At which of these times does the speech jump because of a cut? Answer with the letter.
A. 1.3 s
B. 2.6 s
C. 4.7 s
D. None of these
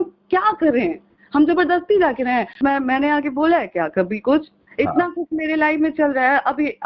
B